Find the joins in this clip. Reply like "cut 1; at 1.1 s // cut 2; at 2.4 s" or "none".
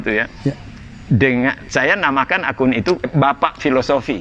cut 1; at 3.1 s